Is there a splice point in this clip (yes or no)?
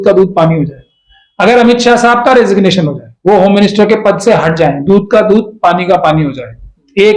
no